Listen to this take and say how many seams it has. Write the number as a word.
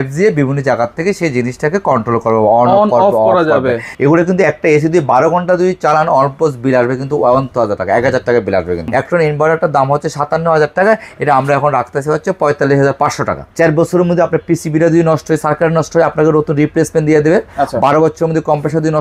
three